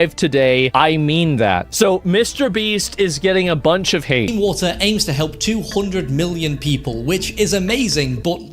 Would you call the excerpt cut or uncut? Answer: cut